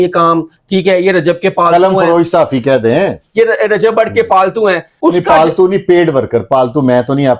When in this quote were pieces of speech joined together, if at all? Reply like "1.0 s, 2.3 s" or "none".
4.9 s